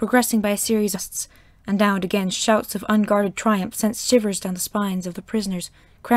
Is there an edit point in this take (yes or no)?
no